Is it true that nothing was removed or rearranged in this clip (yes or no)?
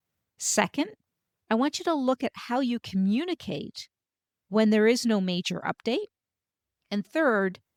yes